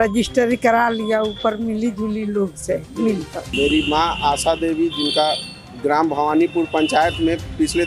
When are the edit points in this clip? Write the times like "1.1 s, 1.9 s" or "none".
3.4 s